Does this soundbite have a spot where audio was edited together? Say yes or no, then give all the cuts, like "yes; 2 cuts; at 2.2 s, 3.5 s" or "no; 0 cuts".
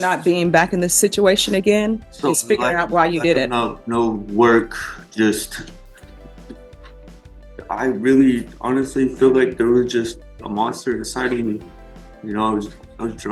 no; 0 cuts